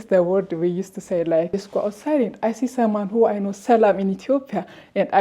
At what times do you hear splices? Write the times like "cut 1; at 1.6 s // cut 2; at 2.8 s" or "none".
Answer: cut 1; at 1.5 s